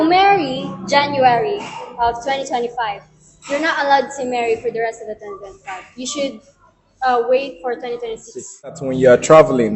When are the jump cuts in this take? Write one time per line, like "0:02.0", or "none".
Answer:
0:08.9